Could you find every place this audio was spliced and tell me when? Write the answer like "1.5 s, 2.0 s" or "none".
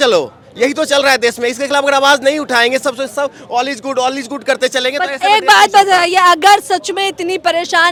none

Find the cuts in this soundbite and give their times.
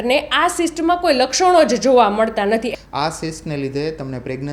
2.7 s

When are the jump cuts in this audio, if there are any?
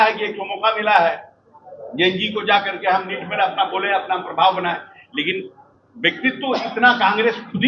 none

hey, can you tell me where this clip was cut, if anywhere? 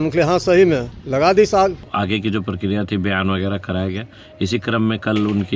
1.0 s, 1.9 s

